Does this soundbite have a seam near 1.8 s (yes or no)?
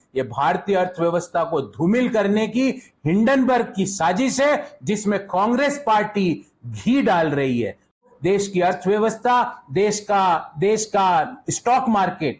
no